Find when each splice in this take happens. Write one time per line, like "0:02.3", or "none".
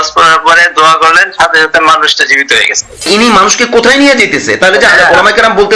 0:03.1